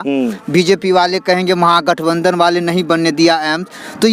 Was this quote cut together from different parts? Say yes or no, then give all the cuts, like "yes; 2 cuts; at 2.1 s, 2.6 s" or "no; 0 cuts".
no; 0 cuts